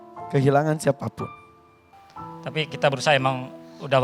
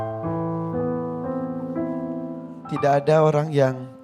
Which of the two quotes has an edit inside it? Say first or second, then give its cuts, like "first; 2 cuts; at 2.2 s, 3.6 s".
second; 1 cut; at 2.6 s